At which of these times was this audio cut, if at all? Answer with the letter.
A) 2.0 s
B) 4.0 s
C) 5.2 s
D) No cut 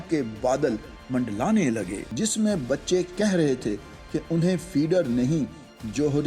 A